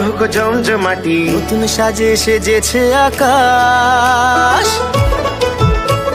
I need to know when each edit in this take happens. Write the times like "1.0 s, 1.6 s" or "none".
none